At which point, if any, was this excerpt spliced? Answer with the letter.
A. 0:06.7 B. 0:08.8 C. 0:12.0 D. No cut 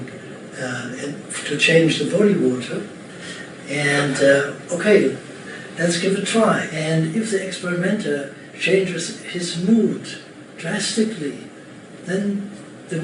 A